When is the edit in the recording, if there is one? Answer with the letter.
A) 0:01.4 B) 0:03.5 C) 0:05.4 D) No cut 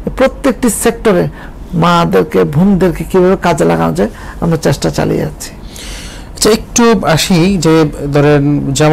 D